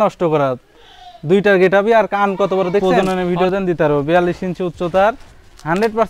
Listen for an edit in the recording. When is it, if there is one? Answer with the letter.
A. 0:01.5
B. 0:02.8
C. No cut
B